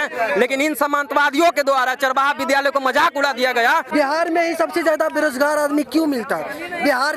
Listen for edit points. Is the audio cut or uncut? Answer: cut